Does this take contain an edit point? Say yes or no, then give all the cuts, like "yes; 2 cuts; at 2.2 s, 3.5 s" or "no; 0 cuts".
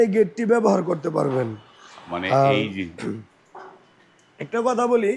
no; 0 cuts